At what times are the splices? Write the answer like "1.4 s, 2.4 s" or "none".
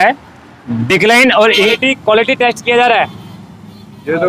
1.7 s